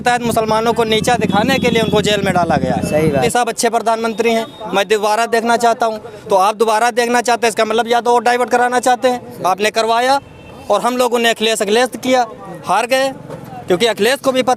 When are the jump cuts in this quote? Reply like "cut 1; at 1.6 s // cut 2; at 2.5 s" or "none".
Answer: cut 1; at 3.3 s